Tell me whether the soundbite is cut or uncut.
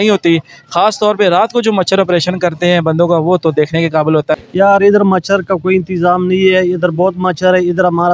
cut